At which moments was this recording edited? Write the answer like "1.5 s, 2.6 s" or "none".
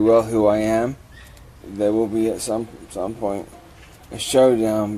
1.5 s